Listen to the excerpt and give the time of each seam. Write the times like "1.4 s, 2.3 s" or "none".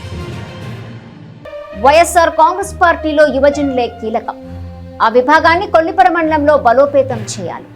0.9 s